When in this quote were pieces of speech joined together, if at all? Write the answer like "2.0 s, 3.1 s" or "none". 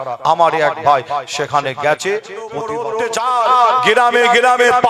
2.7 s